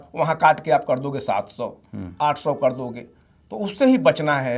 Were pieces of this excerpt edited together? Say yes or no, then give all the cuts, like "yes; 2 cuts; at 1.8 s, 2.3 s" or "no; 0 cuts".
no; 0 cuts